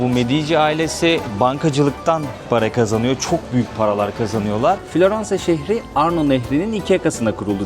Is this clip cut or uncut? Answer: cut